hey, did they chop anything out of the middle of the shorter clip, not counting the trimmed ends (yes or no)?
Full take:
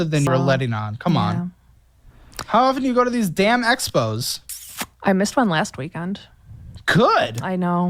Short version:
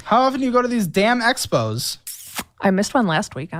no